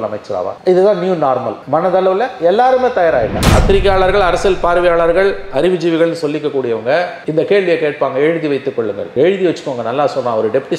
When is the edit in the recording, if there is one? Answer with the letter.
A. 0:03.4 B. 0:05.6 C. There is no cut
A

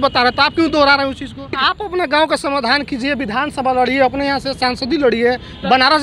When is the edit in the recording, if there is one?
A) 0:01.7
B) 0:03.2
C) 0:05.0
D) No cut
A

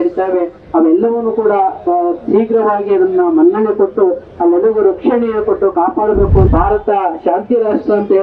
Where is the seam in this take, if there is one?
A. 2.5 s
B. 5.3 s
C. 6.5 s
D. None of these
C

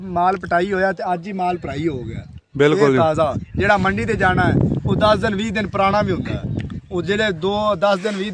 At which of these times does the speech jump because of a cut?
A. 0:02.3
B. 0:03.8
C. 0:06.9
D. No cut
D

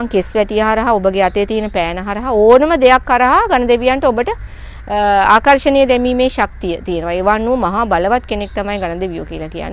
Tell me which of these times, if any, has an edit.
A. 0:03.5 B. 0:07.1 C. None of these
C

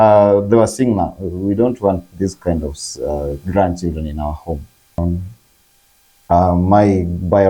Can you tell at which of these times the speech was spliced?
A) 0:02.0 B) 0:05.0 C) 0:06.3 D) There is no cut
B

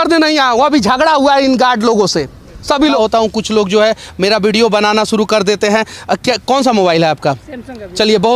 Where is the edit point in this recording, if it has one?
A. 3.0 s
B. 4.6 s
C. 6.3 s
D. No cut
A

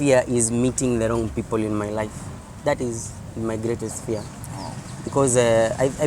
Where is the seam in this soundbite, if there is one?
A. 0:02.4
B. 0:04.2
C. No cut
C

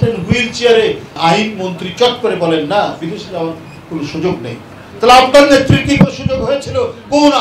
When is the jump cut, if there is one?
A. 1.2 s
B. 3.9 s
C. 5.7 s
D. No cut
A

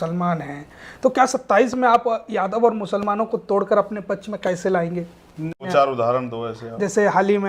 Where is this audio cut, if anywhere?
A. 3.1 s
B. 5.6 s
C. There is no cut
B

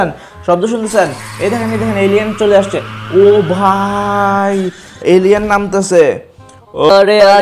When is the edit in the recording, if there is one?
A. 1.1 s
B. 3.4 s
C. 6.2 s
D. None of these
D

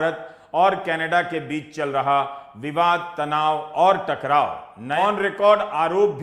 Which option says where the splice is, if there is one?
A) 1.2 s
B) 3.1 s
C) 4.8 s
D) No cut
C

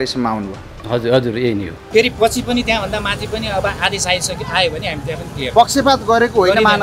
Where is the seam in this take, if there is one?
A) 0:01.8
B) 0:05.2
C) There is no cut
A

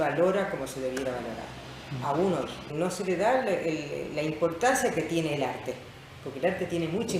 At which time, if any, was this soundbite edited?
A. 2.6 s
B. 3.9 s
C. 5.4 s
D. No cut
A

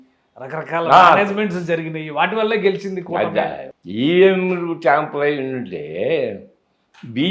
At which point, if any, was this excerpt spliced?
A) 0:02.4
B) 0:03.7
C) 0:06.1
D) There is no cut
B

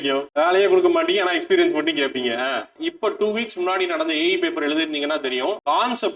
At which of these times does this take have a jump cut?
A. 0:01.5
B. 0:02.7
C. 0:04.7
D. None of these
B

